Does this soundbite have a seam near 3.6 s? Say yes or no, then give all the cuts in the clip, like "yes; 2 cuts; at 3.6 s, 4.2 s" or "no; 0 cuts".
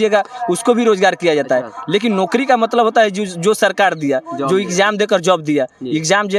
no; 0 cuts